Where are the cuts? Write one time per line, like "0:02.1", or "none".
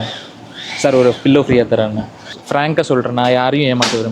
0:02.3